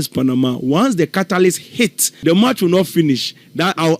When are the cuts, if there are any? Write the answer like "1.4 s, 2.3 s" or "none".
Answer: 2.1 s